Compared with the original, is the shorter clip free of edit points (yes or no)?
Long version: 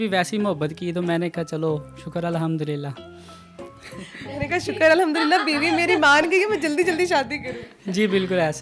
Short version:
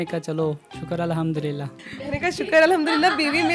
no